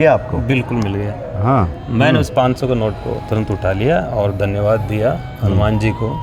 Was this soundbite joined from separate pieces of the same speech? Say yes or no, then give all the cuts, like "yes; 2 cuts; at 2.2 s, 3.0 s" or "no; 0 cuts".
no; 0 cuts